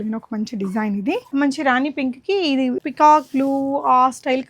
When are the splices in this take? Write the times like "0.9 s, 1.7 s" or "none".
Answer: 1.3 s, 2.8 s